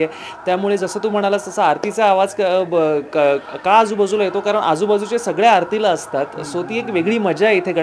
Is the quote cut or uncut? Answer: uncut